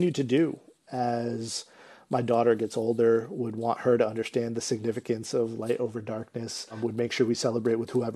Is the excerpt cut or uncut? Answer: uncut